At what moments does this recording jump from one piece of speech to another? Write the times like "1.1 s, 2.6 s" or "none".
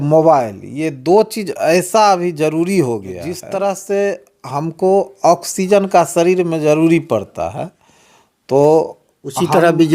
3.4 s